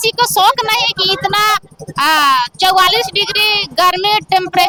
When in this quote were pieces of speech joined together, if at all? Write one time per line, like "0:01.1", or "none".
none